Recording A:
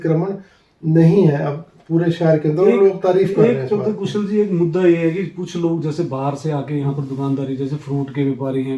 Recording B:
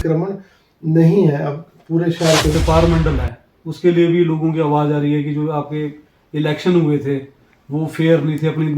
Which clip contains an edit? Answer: B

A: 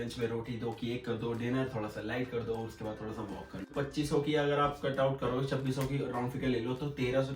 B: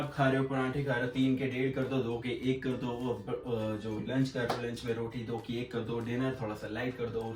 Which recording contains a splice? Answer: A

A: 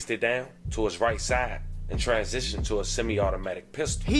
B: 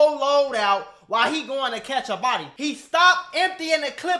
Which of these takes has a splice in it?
B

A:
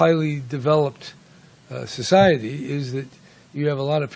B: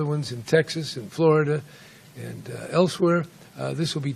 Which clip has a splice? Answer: A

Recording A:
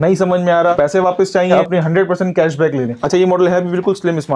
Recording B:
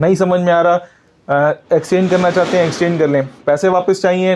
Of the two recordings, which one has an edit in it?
A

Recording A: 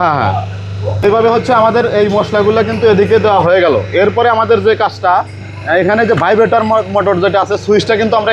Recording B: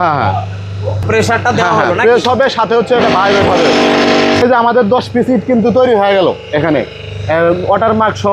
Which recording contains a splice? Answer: B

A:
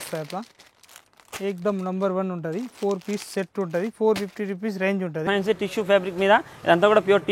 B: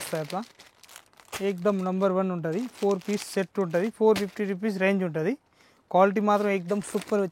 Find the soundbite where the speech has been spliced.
A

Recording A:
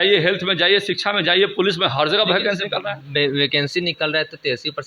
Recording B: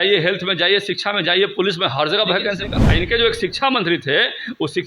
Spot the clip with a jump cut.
B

